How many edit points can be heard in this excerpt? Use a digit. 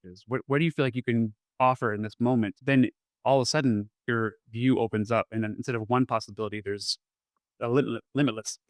1